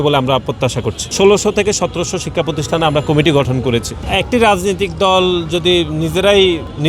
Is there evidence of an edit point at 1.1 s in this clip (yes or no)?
yes